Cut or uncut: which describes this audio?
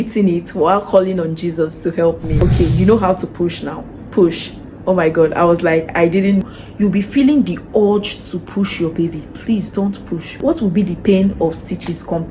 cut